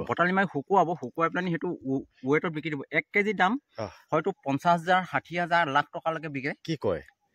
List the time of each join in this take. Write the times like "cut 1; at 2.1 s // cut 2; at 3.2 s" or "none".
none